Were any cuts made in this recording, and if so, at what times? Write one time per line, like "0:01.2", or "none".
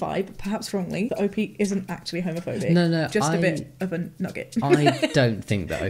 none